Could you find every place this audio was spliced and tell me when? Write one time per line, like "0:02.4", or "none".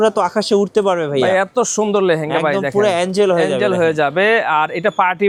none